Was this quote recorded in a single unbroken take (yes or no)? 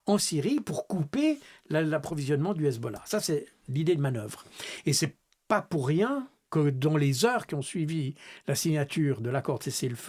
yes